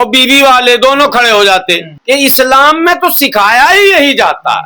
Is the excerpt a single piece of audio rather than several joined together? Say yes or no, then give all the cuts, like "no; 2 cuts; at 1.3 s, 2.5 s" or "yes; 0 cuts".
no; 1 cut; at 1.9 s